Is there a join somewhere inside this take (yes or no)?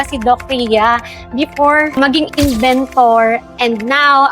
yes